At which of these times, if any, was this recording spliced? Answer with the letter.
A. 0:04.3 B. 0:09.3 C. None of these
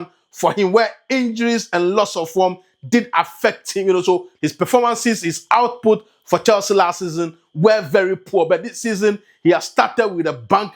A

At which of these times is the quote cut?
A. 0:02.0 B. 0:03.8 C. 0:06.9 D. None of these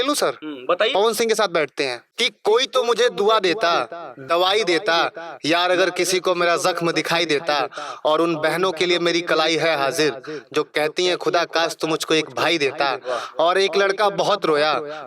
A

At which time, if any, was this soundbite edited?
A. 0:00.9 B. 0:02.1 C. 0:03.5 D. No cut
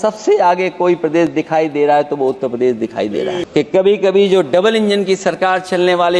C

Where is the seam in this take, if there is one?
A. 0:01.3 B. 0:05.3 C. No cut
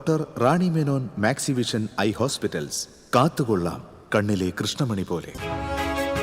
B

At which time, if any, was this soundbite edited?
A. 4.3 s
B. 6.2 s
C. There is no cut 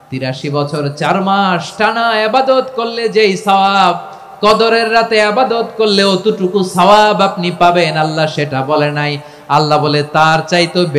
C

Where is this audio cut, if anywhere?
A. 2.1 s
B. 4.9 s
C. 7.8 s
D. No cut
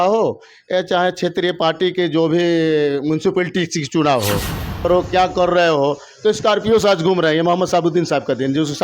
B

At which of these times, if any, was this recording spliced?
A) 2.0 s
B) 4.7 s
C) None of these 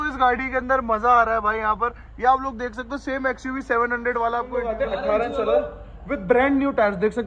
B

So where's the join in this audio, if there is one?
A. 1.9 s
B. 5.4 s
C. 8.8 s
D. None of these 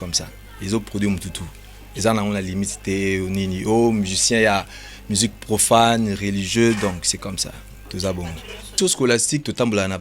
C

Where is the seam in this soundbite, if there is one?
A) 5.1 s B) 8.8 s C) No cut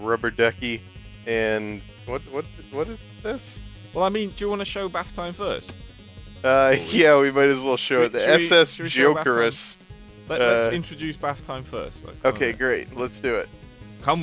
B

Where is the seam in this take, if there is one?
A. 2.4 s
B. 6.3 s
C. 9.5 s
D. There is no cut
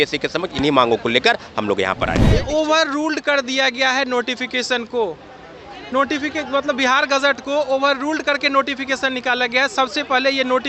A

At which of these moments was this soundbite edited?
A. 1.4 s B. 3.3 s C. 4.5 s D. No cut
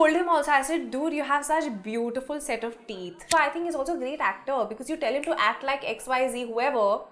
B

